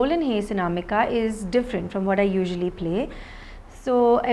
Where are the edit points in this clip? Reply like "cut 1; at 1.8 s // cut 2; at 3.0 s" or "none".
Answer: none